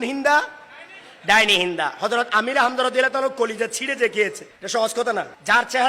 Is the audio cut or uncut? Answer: cut